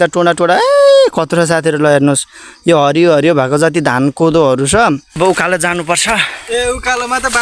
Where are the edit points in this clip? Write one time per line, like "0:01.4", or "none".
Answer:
0:05.1